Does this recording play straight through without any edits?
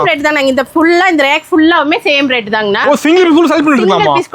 no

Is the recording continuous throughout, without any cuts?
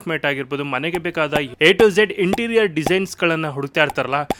yes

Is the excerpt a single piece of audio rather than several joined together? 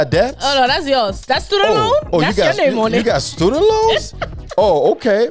yes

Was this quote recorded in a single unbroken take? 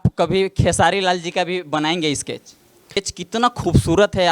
no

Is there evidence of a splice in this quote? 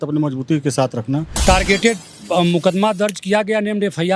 yes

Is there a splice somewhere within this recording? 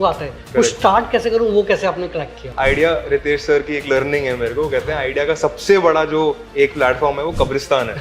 yes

